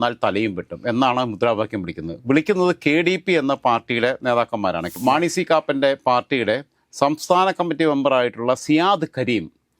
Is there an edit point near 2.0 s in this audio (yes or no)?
no